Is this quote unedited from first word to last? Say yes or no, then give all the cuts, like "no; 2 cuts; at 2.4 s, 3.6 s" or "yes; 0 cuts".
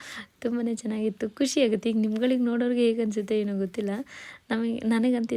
yes; 0 cuts